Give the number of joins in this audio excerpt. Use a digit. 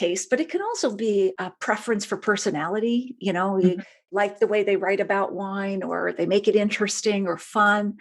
0